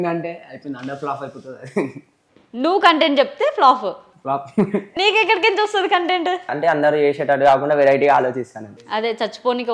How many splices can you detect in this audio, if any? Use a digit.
2